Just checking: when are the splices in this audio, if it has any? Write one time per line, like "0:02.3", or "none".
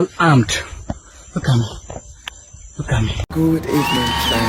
0:03.2